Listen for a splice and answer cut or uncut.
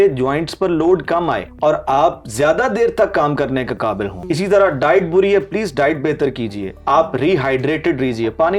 cut